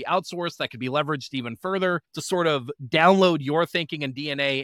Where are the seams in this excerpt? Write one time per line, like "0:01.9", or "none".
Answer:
0:02.1